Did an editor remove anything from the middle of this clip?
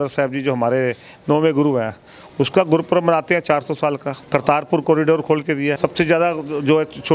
yes; 2 cuts; at 4.1 s, 5.8 s

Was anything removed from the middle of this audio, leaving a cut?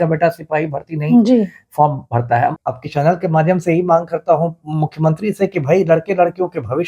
yes; 1 cut; at 2.6 s

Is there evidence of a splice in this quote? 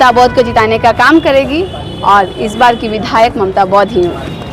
no; 0 cuts

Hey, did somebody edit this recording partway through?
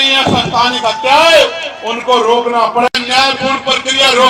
yes; 1 cut; at 2.9 s

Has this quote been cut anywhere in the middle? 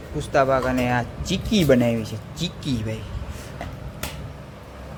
no; 0 cuts

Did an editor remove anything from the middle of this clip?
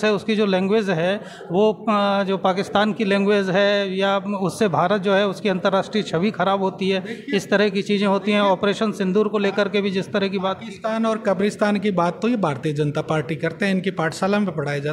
no; 0 cuts

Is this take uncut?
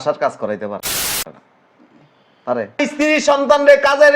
no; 1 cut; at 2.9 s

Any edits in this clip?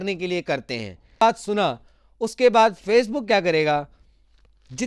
yes; 1 cut; at 1.2 s

